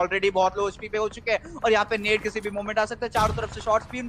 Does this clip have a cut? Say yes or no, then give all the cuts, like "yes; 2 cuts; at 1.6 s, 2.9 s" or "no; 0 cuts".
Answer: no; 0 cuts